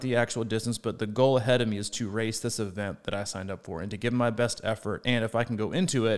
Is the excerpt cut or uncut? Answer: uncut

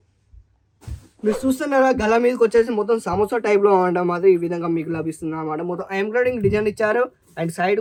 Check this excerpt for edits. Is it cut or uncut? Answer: uncut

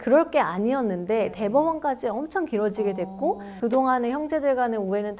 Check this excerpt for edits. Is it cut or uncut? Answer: cut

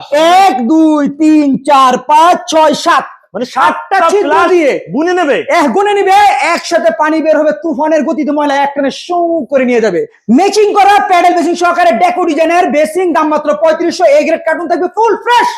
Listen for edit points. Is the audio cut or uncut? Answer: cut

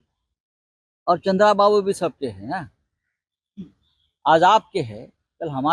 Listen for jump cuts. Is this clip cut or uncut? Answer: uncut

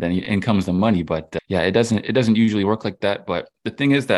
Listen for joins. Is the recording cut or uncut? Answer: uncut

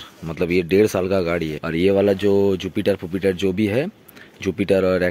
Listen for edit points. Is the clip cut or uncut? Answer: cut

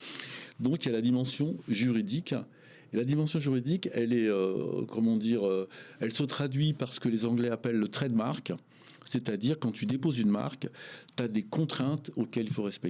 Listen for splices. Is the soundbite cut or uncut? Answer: uncut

